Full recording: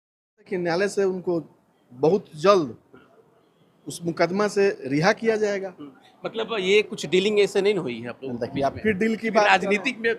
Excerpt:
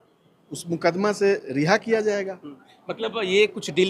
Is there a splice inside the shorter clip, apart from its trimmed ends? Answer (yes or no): no